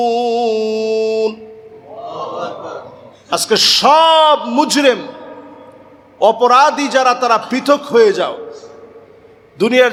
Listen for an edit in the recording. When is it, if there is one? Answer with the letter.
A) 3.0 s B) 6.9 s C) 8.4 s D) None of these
D